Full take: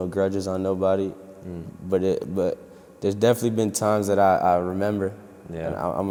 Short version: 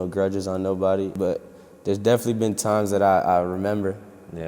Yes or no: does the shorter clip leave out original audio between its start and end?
yes